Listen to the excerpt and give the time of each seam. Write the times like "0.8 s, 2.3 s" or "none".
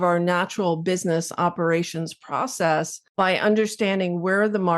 3.0 s

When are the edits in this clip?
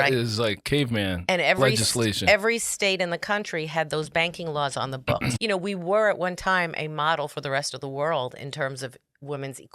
5.3 s

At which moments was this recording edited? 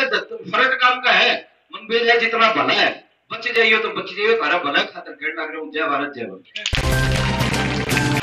none

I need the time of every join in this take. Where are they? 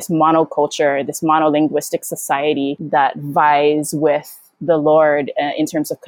2.8 s

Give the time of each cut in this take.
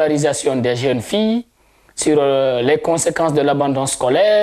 none

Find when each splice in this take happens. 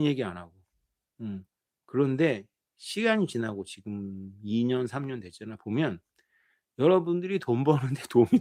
none

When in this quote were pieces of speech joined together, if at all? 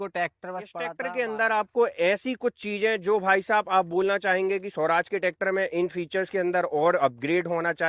1.0 s

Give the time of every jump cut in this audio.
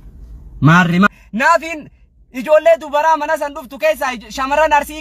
1.1 s

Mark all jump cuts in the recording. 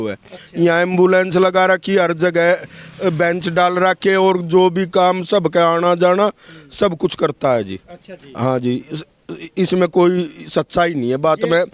none

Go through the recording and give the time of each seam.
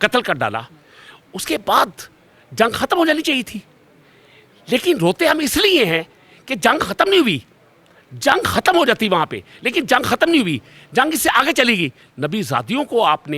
none

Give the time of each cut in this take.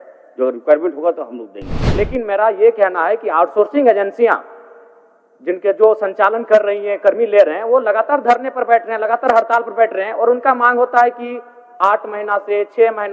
1.8 s

